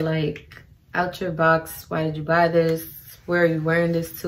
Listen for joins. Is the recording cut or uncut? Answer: uncut